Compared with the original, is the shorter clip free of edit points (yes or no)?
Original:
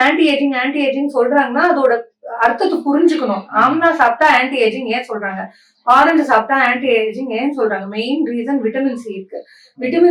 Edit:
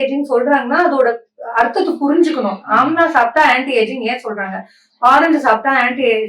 yes